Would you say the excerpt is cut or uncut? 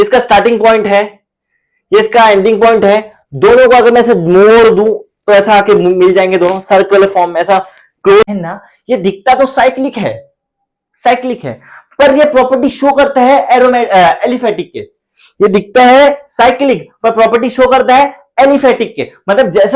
cut